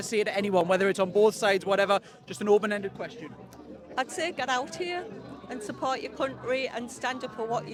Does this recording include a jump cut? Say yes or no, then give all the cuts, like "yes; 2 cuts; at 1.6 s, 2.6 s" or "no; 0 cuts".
no; 0 cuts